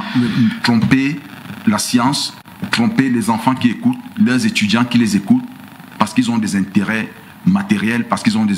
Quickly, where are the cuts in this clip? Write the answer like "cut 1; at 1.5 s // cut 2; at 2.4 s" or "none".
none